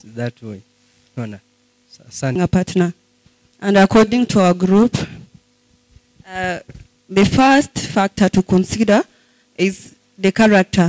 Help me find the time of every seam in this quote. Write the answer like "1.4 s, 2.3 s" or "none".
2.4 s